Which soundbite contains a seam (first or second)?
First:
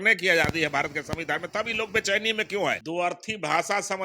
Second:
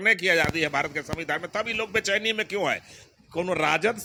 first